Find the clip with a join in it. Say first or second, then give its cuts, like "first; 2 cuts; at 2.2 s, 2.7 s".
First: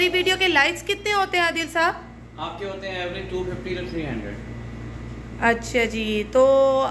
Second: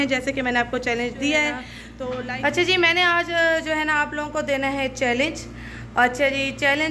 second; 1 cut; at 1.8 s